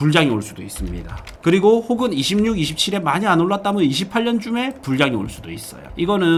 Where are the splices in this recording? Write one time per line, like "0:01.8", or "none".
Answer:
none